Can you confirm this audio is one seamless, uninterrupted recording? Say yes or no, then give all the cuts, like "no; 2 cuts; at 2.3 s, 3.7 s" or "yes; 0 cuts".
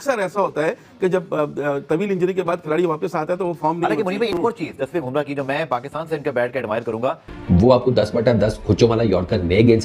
no; 1 cut; at 7.3 s